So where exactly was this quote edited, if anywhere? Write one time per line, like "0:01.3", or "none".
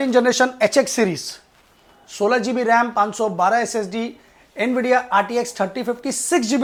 none